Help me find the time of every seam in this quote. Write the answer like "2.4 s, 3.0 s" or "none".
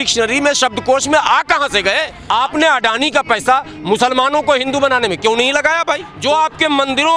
2.1 s, 6.1 s